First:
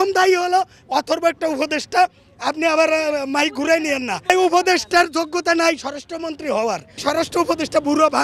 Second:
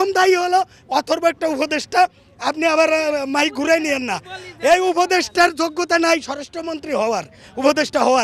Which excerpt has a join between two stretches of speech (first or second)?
first